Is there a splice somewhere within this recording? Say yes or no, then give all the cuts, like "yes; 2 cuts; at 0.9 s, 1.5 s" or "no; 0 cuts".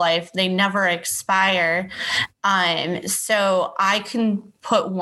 no; 0 cuts